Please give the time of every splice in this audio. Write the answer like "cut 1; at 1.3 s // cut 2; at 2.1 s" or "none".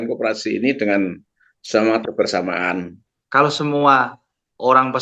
cut 1; at 3.0 s